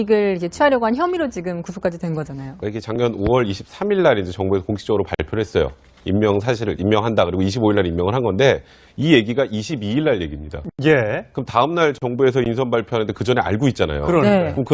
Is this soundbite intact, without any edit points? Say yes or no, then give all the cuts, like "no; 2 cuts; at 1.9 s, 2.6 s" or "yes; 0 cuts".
no; 1 cut; at 1.4 s